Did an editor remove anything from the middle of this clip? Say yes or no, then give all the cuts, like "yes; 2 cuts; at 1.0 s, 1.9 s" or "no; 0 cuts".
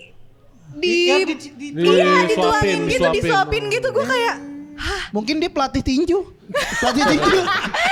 no; 0 cuts